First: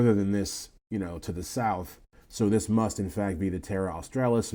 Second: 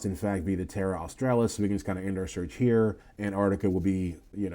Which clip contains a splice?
second; 1 cut; at 3.1 s

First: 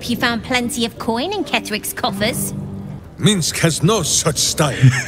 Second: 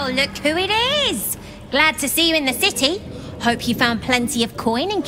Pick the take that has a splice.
first; 1 cut; at 3.0 s

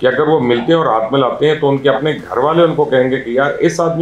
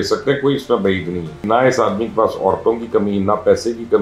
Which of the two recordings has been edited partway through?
second; 1 cut; at 1.4 s

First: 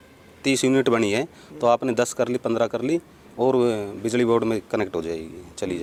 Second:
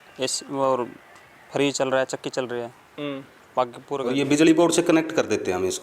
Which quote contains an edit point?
second; 1 cut; at 3.9 s

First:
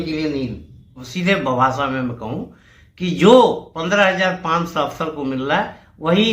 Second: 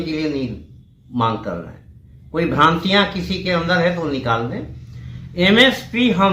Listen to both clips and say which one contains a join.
first; 1 cut; at 1.0 s

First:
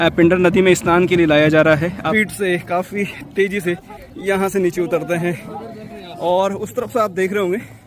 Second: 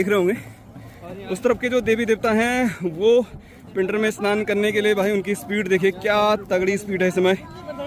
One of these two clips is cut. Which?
first; 1 cut; at 2.1 s

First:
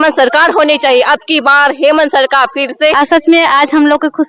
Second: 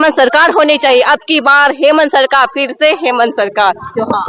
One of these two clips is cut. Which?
first; 1 cut; at 2.9 s

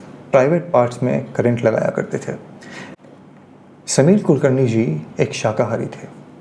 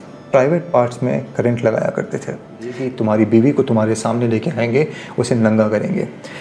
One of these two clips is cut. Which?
second; 1 cut; at 2.9 s

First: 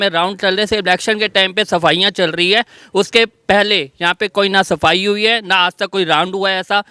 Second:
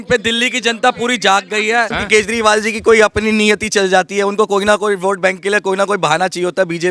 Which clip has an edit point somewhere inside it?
second; 1 cut; at 2.0 s

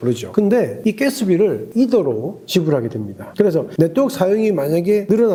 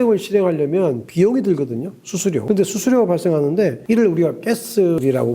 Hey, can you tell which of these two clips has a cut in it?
second; 1 cut; at 2.4 s

